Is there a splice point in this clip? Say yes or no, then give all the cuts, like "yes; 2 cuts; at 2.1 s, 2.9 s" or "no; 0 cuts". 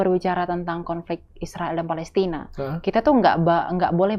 no; 0 cuts